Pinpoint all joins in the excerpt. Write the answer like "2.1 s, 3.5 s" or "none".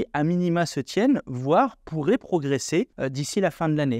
3.0 s